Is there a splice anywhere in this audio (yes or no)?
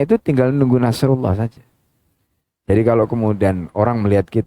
no